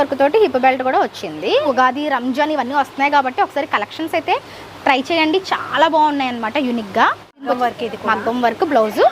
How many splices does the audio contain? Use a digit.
2